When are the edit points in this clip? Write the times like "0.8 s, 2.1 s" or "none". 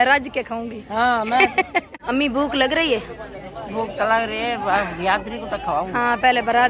2.0 s